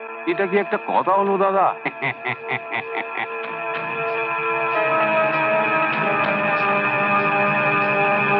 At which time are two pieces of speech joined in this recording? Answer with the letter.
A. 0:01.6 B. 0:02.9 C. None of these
C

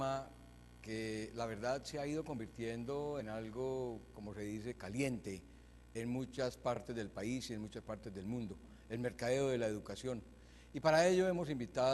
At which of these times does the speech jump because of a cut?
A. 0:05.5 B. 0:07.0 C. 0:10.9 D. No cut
C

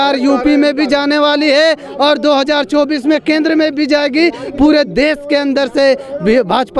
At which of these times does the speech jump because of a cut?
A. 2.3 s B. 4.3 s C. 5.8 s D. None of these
D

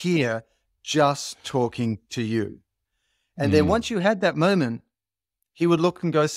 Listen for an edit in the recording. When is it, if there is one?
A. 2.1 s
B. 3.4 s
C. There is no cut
C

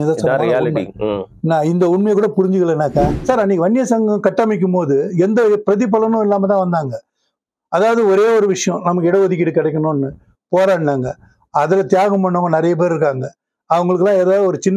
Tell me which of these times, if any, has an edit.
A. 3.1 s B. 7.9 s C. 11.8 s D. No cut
A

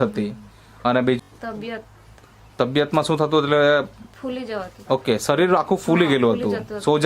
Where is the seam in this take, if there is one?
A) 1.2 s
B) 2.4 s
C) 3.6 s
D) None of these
A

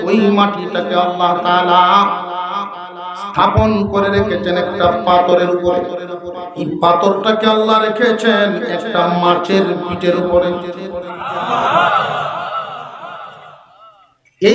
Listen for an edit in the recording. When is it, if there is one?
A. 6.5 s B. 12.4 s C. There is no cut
A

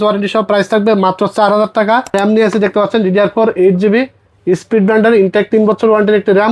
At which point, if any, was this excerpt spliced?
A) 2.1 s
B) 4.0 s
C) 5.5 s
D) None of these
A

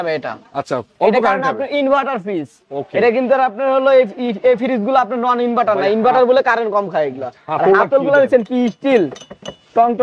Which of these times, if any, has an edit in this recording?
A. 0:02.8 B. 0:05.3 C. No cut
C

